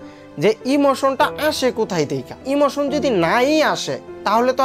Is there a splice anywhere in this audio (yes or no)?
yes